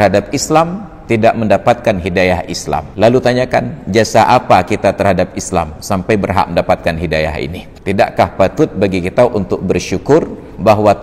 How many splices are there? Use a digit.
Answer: 2